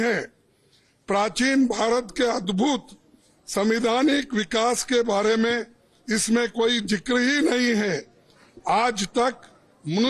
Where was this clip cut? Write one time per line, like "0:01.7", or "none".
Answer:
none